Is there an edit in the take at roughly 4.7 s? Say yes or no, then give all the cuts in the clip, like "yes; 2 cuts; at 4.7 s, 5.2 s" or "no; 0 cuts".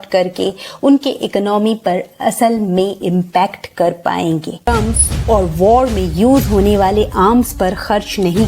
yes; 1 cut; at 4.7 s